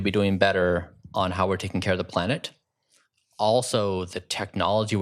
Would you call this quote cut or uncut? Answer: uncut